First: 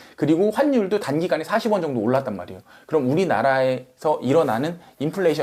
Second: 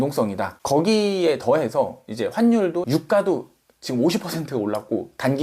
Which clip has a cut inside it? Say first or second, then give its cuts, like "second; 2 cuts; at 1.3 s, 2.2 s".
second; 1 cut; at 2.9 s